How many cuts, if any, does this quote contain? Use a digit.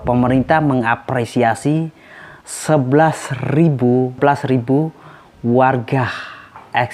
1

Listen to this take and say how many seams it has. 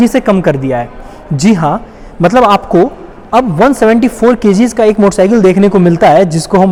0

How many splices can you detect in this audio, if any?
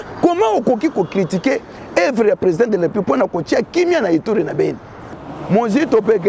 1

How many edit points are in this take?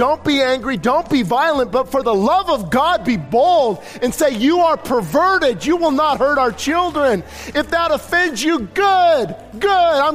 1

